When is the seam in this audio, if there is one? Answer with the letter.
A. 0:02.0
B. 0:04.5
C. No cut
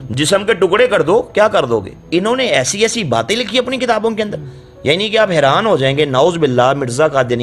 A